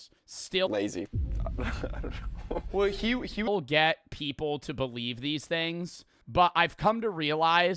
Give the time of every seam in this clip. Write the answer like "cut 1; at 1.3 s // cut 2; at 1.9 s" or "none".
none